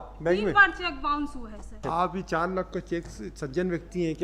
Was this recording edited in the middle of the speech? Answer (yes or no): yes